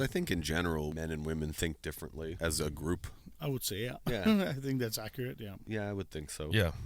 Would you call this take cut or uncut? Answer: cut